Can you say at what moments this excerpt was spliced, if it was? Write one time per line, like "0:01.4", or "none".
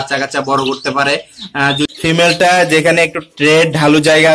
0:01.9